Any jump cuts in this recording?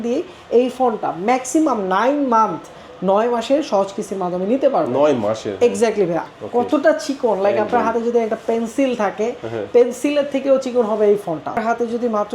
yes; 2 cuts; at 6.2 s, 11.6 s

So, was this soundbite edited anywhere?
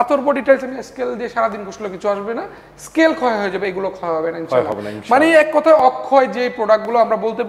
no; 0 cuts

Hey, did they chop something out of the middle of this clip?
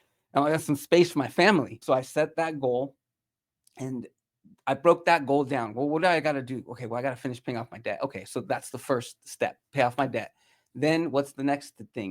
no; 0 cuts

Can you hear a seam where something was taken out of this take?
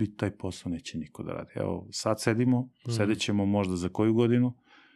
no; 0 cuts

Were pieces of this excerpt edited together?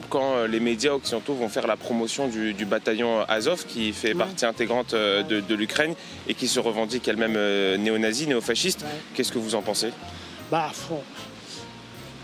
no; 0 cuts

